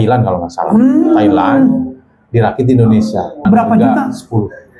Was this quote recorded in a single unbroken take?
no; 1 cut; at 3.4 s

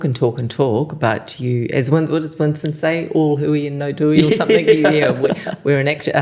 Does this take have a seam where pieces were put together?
no; 0 cuts

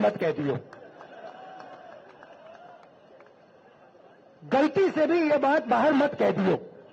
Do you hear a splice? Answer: no; 0 cuts

